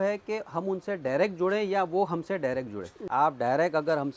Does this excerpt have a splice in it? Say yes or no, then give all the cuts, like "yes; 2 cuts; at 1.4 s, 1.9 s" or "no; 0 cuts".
yes; 1 cut; at 2.9 s